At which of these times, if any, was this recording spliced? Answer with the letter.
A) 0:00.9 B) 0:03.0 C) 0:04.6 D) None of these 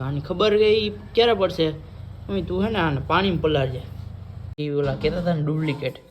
C